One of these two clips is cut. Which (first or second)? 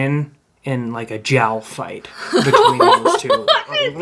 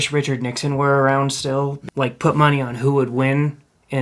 second